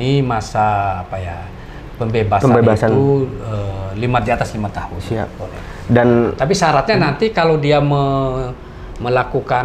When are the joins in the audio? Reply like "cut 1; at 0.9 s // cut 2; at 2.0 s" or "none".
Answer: none